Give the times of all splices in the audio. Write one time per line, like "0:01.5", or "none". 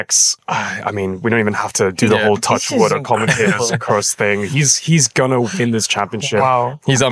none